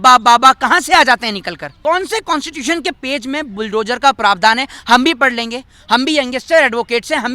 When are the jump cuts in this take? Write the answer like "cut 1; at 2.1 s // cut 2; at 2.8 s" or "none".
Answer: cut 1; at 1.7 s